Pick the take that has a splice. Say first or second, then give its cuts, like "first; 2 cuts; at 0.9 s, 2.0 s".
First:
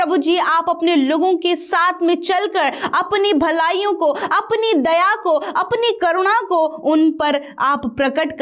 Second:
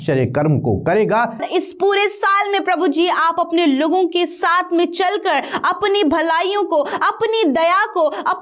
second; 1 cut; at 1.4 s